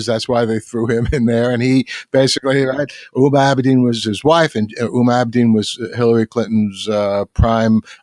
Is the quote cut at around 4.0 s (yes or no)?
yes